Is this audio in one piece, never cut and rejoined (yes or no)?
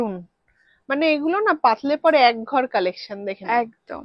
yes